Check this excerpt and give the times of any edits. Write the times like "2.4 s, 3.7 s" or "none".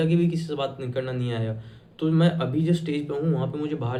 none